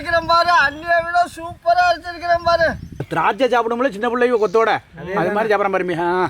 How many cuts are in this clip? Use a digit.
1